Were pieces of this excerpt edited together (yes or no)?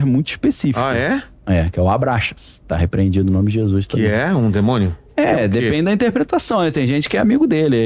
no